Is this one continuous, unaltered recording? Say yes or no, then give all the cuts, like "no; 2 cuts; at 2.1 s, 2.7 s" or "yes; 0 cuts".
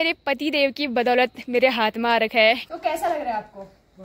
no; 1 cut; at 2.7 s